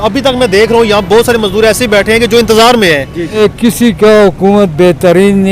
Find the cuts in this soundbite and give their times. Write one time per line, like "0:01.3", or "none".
0:03.4